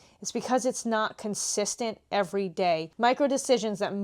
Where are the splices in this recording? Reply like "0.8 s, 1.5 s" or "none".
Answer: 2.9 s

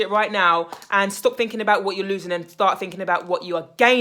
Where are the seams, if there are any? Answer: none

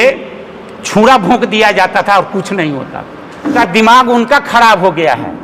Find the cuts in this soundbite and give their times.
3.6 s

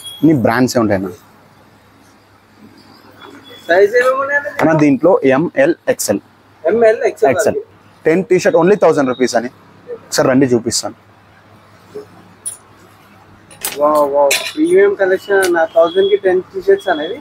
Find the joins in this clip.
7.6 s

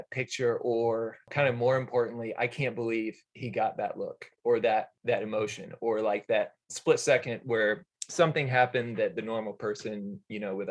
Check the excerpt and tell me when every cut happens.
1.3 s, 4.9 s

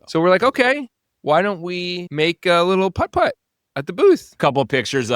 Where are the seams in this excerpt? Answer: 2.0 s, 4.4 s

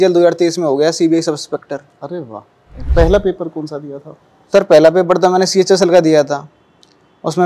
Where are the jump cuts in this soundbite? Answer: 2.9 s

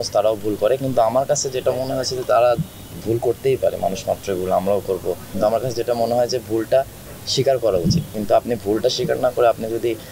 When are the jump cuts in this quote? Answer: 5.3 s, 8.1 s

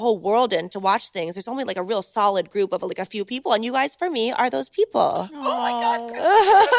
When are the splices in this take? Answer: none

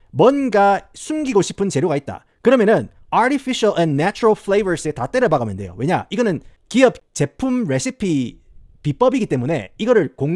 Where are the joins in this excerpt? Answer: none

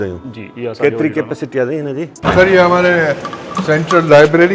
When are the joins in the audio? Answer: 2.1 s

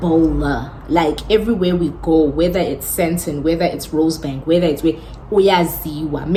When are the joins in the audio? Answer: none

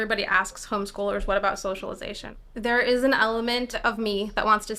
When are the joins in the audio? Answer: 2.3 s, 3.7 s

